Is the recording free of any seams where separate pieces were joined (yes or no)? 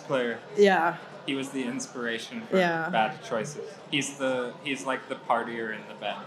yes